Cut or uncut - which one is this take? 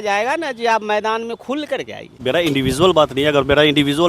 cut